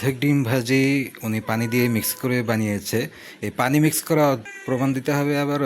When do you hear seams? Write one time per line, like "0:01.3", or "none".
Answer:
0:04.4